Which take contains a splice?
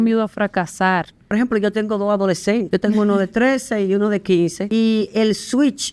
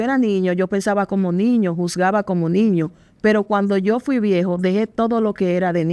first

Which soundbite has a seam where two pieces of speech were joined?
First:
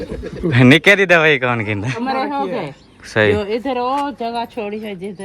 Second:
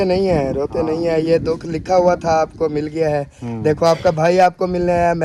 first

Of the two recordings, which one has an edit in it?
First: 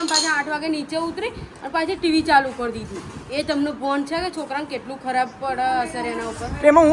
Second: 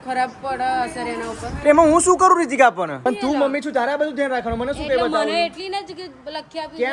second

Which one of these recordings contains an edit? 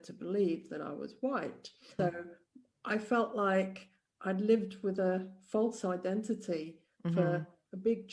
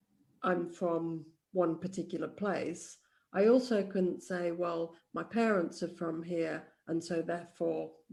first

